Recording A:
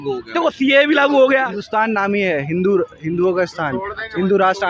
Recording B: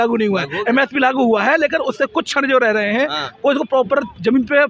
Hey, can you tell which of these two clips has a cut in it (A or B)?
A